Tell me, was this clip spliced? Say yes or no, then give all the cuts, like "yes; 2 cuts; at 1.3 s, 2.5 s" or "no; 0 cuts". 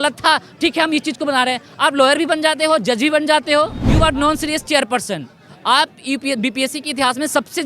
yes; 1 cut; at 3.8 s